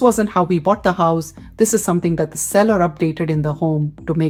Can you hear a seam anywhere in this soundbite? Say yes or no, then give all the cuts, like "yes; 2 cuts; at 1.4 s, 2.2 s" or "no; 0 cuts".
no; 0 cuts